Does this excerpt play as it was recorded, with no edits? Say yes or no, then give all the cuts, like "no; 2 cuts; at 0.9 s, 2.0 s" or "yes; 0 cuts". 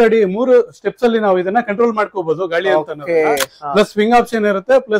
yes; 0 cuts